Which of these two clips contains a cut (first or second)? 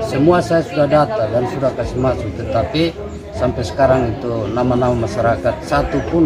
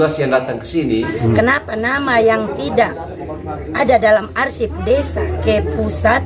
second